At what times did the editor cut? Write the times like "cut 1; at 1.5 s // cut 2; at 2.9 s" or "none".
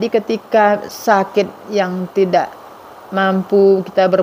none

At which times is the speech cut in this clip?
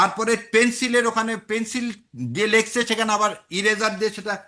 none

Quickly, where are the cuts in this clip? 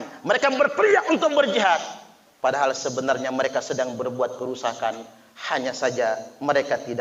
none

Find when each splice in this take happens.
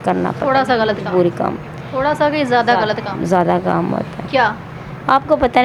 none

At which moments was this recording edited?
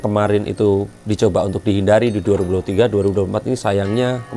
none

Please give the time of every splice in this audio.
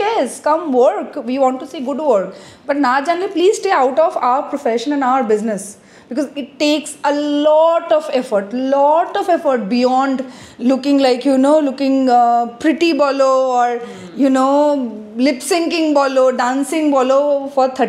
none

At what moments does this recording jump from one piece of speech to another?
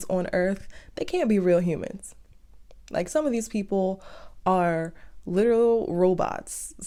none

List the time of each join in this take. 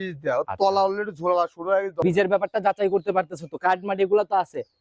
cut 1; at 2.0 s

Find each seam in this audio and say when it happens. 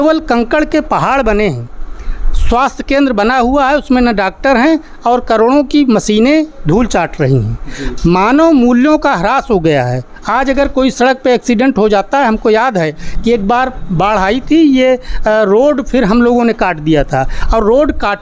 none

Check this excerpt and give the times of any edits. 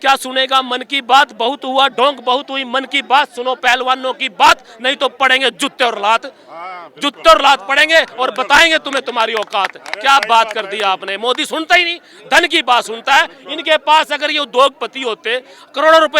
none

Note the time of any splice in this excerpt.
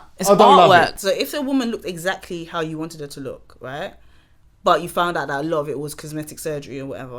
cut 1; at 1.0 s

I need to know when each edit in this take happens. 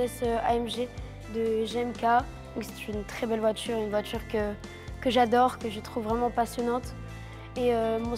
none

